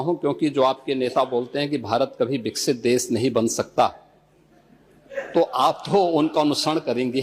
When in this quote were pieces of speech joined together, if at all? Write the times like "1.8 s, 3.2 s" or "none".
none